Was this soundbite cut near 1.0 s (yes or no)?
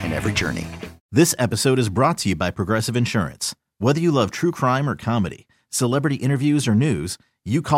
yes